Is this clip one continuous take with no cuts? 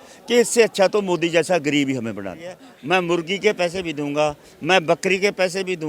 no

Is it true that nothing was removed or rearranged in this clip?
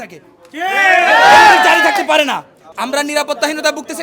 no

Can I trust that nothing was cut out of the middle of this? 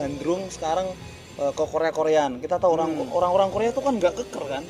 yes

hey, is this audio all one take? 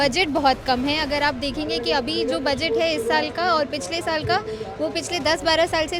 yes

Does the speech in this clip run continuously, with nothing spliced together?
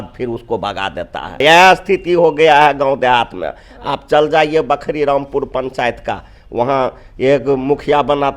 no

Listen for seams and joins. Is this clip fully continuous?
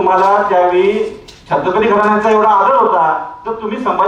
yes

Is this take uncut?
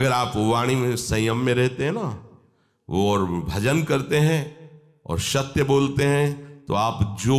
yes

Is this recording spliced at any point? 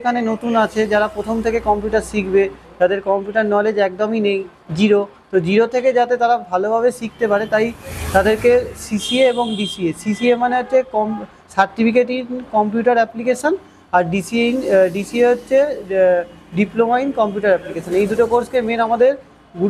no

